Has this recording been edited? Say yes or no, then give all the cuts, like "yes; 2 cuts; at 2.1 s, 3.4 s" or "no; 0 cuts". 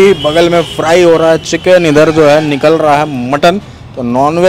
no; 0 cuts